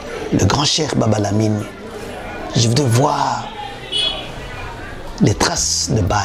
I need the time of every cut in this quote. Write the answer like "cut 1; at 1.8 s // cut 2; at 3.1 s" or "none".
none